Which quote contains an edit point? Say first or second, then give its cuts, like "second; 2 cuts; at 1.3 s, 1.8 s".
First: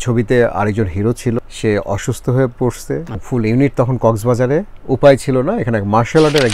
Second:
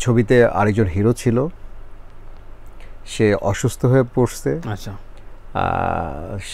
first; 3 cuts; at 1.4 s, 3.2 s, 4.8 s